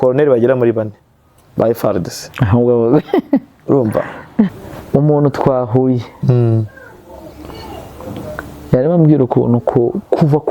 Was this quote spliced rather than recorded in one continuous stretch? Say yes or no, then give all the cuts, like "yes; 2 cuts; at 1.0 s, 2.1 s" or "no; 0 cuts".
yes; 1 cut; at 4.5 s